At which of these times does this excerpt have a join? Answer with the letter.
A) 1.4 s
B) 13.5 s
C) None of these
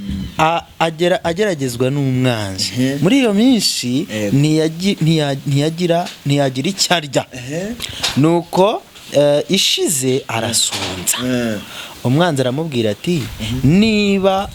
C